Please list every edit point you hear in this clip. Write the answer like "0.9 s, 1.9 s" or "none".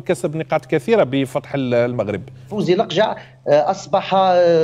2.5 s